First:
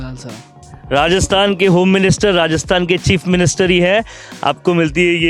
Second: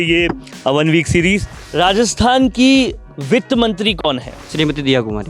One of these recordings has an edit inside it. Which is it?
second; 2 cuts; at 1.6 s, 4.4 s

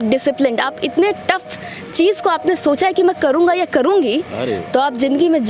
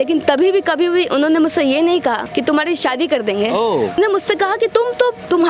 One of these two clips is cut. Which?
second; 2 cuts; at 2.2 s, 4.0 s

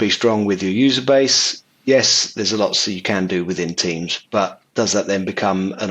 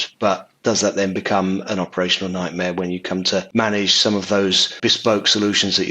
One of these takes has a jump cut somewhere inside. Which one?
second; 2 cuts; at 3.5 s, 4.8 s

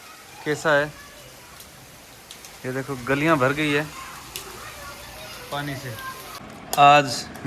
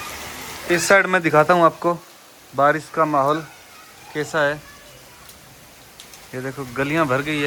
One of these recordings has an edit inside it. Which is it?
first; 1 cut; at 6.4 s

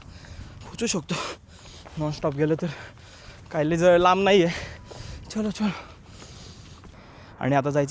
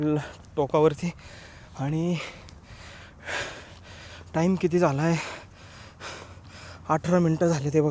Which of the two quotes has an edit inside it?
first; 1 cut; at 6.9 s

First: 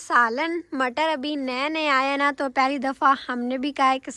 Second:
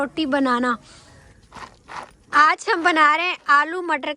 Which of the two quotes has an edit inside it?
second; 1 cut; at 1.2 s

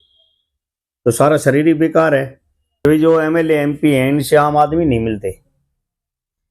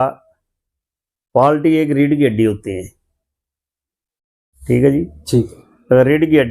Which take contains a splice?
first; 1 cut; at 2.9 s

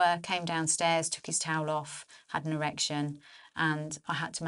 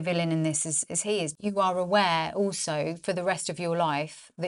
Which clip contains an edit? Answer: second; 1 cut; at 1.4 s

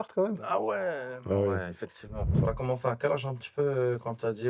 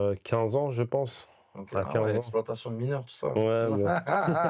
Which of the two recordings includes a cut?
first; 1 cut; at 2.4 s

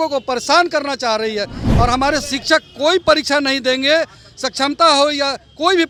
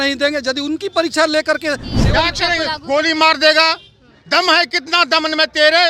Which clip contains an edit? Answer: second; 1 cut; at 1.9 s

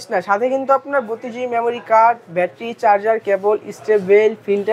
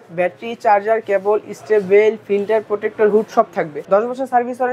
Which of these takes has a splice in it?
second; 1 cut; at 3.8 s

